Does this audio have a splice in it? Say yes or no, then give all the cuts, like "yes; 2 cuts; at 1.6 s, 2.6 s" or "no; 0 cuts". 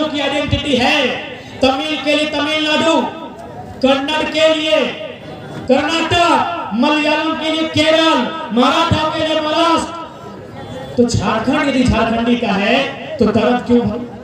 no; 0 cuts